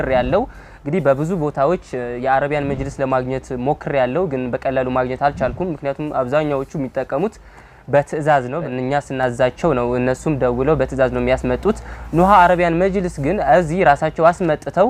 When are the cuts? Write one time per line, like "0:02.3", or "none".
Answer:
0:08.6